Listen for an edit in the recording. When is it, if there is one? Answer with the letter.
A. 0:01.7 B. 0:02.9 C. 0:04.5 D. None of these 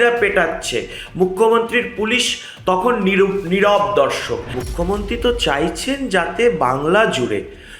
C